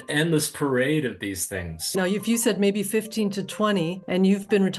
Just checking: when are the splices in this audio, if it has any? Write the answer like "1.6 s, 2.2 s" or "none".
1.9 s